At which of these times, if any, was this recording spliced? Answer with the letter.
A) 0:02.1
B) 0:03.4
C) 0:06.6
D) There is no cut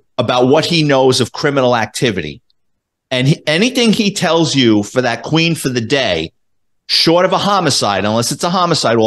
D